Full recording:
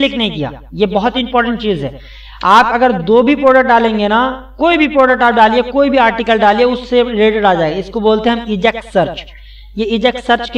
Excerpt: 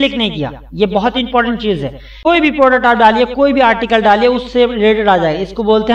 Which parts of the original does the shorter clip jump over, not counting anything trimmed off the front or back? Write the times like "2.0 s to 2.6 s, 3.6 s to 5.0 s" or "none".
2.1 s to 4.4 s